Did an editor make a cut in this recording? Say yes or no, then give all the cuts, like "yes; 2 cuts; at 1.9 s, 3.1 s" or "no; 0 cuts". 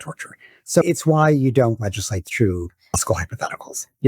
yes; 2 cuts; at 0.8 s, 2.9 s